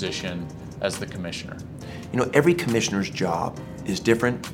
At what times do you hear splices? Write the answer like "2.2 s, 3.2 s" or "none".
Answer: 1.8 s